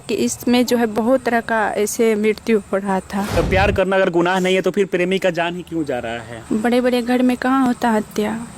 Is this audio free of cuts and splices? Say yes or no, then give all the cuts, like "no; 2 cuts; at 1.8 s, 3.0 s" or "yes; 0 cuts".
no; 2 cuts; at 3.4 s, 6.4 s